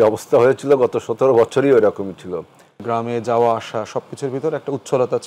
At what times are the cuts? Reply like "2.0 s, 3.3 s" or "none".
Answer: 2.8 s